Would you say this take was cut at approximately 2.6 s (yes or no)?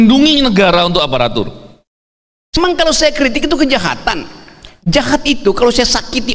yes